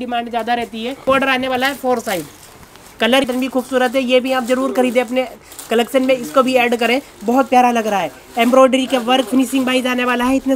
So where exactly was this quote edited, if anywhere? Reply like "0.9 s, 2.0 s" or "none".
1.0 s, 3.2 s

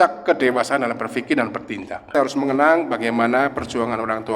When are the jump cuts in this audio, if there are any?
2.1 s

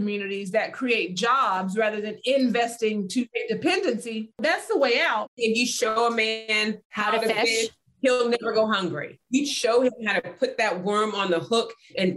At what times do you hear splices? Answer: 4.4 s, 5.4 s, 9.1 s

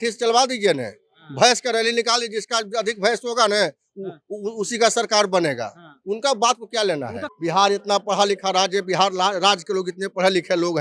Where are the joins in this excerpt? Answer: 7.2 s

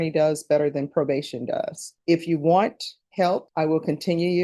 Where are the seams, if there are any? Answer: 1.8 s, 3.3 s

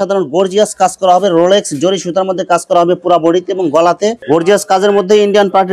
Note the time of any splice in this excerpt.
4.2 s

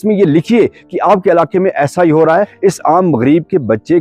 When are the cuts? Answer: 2.5 s

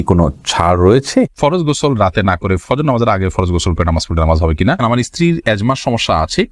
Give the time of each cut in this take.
1.3 s, 4.8 s

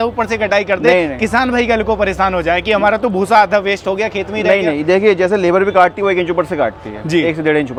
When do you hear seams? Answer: none

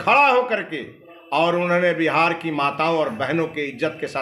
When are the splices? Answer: none

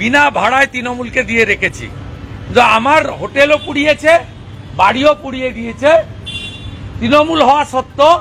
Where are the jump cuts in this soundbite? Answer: none

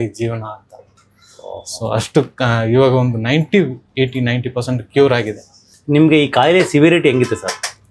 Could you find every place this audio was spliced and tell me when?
5.7 s

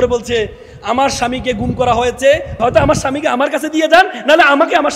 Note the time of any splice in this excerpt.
2.5 s

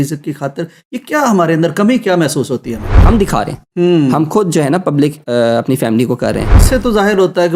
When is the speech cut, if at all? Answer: 3.0 s, 6.6 s

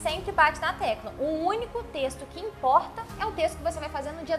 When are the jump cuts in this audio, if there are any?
none

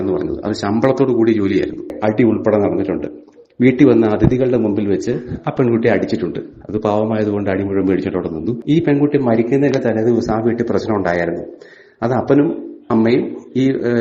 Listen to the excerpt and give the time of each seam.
1.9 s, 8.5 s

